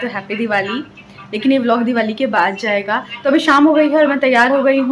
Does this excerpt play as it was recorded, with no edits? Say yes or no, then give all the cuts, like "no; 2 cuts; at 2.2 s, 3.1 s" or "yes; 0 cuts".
no; 1 cut; at 3.2 s